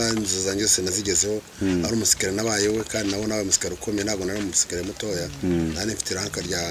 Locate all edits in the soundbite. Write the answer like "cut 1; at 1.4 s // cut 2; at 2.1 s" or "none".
none